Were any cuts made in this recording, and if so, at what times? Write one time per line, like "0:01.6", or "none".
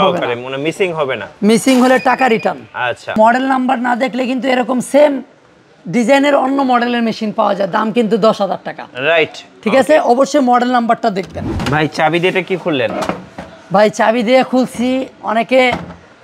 0:03.2
0:11.5